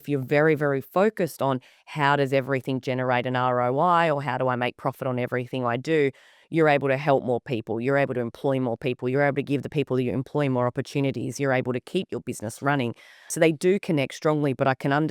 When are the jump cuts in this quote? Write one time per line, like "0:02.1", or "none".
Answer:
0:13.3